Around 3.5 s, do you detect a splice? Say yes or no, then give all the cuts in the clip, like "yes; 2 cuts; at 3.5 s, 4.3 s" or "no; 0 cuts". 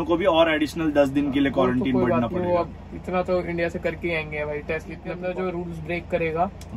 no; 1 cut; at 5.2 s